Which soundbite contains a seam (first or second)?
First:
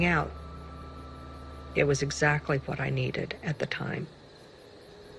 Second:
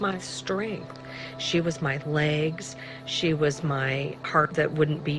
first